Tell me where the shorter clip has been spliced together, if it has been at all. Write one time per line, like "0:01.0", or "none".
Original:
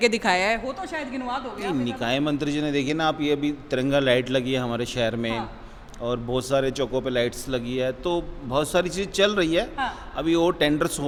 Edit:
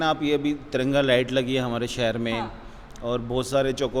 none